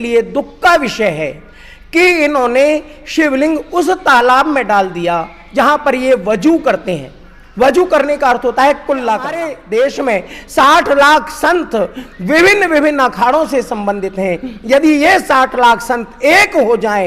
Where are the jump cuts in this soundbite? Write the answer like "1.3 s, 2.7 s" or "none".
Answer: 9.5 s